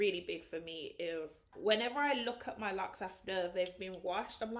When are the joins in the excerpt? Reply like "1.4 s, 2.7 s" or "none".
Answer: 1.5 s